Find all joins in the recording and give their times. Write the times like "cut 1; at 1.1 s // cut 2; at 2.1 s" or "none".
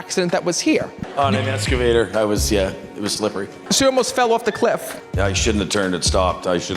cut 1; at 1.0 s // cut 2; at 3.5 s // cut 3; at 5.0 s